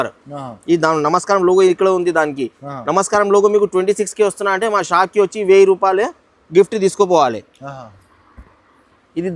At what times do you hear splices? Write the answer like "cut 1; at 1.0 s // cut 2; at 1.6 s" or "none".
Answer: none